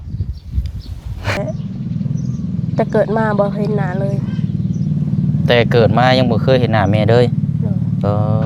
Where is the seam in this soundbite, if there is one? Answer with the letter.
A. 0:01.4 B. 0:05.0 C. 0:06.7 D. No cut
A